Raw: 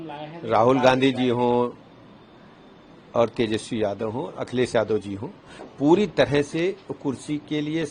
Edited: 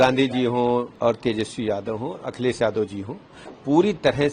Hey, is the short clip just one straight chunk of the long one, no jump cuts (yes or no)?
no